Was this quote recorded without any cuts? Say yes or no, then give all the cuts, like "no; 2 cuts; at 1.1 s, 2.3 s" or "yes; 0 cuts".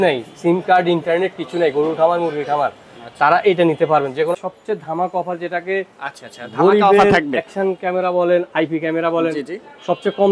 no; 1 cut; at 4.4 s